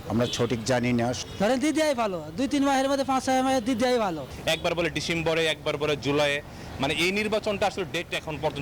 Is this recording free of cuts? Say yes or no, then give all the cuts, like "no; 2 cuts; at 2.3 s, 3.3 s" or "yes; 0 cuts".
no; 2 cuts; at 1.2 s, 4.3 s